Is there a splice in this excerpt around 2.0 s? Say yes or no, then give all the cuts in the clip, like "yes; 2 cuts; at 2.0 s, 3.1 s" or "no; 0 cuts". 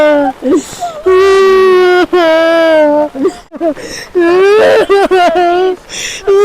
no; 1 cut; at 3.6 s